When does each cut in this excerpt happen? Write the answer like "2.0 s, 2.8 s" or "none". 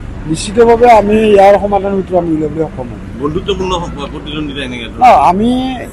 none